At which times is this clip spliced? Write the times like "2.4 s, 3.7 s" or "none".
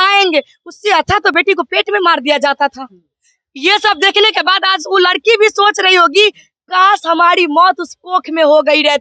none